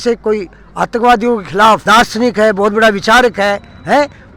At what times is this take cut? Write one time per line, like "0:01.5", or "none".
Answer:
0:01.9